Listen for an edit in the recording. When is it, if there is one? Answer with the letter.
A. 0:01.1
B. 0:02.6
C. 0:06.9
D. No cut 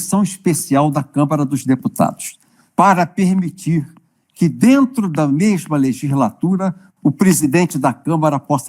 B